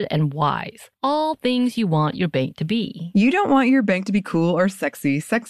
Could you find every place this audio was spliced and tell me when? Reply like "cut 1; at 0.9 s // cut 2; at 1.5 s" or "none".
none